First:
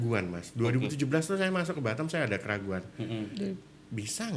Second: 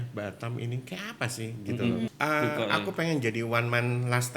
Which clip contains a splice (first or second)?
second